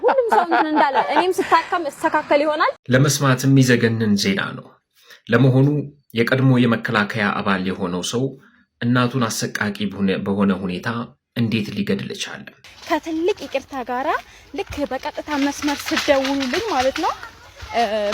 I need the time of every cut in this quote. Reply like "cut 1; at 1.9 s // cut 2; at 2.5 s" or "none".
cut 1; at 2.8 s // cut 2; at 12.7 s